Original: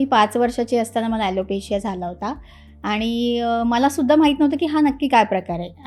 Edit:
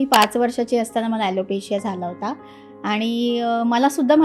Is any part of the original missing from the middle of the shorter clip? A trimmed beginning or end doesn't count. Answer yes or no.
no